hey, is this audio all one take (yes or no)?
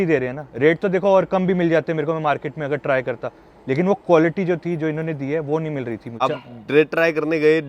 no